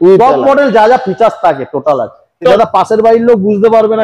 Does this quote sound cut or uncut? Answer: cut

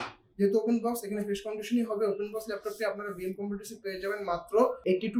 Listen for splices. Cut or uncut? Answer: uncut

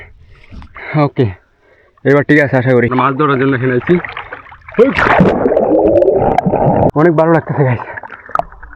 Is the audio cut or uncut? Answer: cut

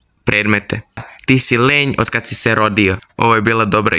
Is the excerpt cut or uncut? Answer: cut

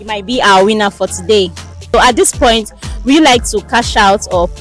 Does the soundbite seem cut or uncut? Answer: cut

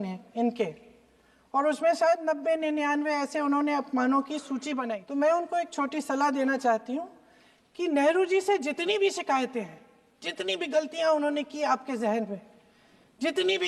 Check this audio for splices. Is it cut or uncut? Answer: cut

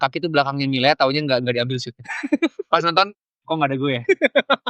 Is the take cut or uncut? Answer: uncut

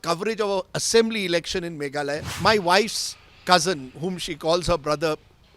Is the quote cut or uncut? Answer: cut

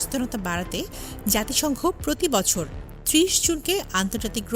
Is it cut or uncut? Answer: uncut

